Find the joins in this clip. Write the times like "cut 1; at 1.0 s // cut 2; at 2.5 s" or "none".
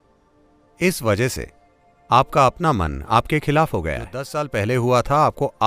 cut 1; at 4.4 s

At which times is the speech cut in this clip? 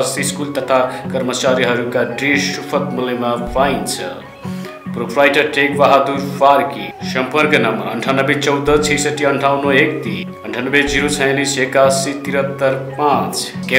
none

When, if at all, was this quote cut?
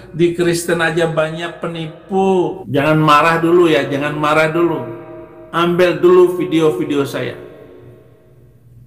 cut 1; at 2.6 s

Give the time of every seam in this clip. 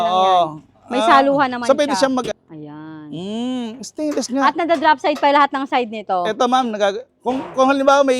cut 1; at 2.3 s

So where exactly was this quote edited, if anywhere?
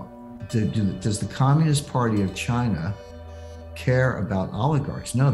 none

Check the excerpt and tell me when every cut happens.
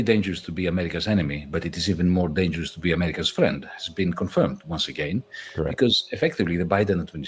none

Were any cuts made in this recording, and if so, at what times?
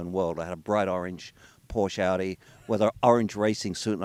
none

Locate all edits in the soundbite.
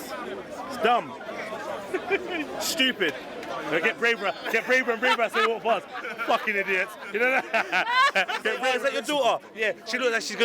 cut 1; at 8.6 s

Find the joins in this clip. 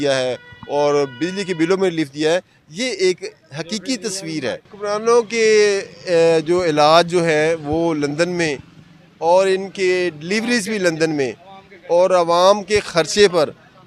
cut 1; at 4.7 s

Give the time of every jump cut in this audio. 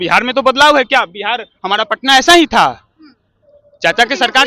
none

